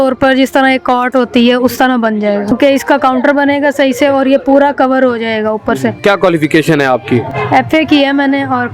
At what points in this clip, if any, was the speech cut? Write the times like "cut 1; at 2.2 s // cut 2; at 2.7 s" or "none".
cut 1; at 2.5 s // cut 2; at 6.0 s // cut 3; at 7.3 s